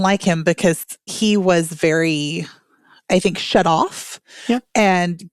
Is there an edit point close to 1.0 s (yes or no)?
yes